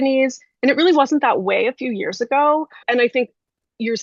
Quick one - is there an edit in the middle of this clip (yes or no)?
yes